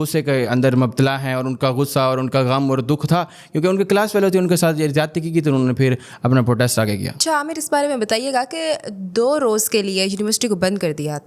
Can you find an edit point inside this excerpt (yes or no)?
no